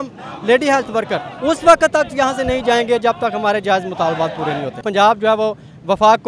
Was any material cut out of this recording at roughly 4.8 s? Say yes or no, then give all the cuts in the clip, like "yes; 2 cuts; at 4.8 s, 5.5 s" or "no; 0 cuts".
yes; 1 cut; at 4.8 s